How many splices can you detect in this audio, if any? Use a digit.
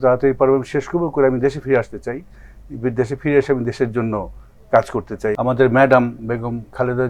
1